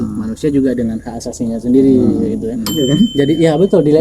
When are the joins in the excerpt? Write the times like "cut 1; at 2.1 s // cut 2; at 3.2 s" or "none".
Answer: cut 1; at 2.6 s